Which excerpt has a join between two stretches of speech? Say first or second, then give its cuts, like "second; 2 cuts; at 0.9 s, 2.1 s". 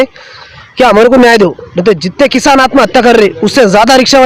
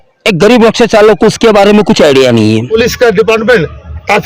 second; 1 cut; at 2.7 s